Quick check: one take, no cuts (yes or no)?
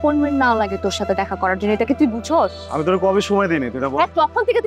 yes